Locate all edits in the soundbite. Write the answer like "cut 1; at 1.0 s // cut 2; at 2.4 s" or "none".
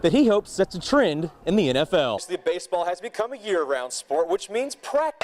cut 1; at 2.2 s